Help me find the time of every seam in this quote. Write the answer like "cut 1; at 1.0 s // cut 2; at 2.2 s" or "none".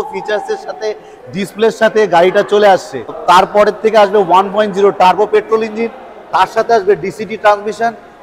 cut 1; at 3.2 s